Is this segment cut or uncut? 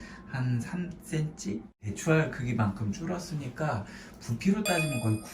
cut